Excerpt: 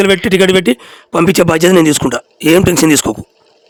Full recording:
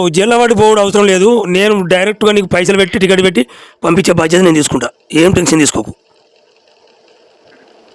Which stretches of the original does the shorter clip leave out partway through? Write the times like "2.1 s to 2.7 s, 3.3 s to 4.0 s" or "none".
none